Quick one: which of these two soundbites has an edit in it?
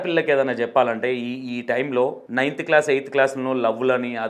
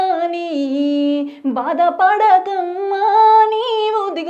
first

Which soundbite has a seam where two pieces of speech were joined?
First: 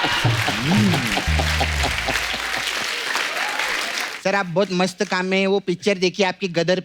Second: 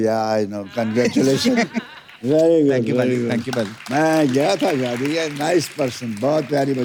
first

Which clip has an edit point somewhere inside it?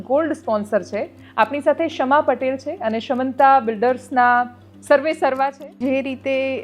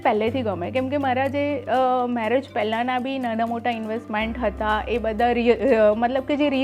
first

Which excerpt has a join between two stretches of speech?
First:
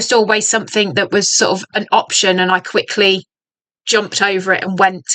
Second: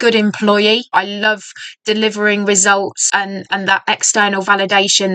second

